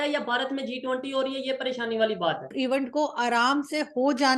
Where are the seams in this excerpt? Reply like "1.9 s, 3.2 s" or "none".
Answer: 2.5 s

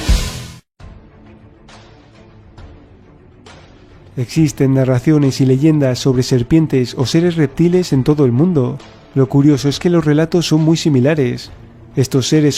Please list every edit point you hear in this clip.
none

